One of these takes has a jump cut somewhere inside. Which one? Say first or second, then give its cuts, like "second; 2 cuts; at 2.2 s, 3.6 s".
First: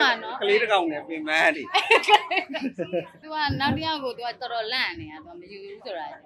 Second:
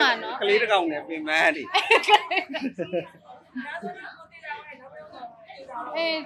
first; 1 cut; at 3.2 s